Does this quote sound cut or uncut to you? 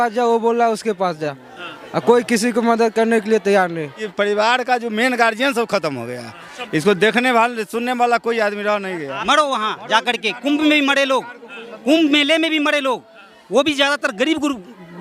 cut